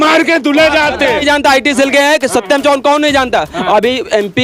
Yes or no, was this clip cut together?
yes